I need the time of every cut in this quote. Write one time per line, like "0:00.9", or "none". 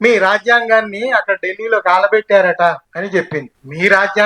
0:03.2